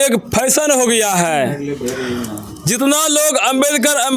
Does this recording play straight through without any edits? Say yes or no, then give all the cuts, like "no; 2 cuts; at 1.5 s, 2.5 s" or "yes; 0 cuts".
yes; 0 cuts